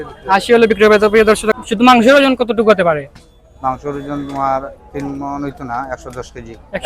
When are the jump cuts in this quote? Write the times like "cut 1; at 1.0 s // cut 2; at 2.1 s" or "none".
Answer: cut 1; at 1.5 s